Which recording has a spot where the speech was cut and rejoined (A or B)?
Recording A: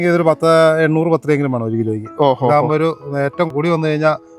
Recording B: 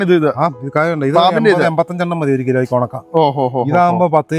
A